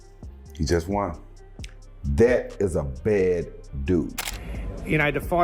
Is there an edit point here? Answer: yes; 1 cut; at 4.2 s

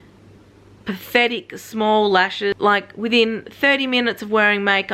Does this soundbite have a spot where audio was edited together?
yes; 1 cut; at 2.6 s

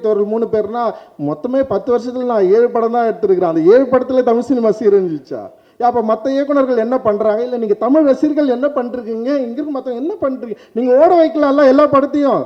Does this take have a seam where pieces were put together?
no; 0 cuts

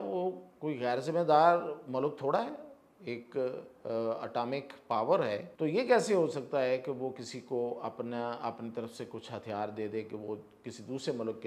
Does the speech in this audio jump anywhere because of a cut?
yes; 1 cut; at 5.5 s

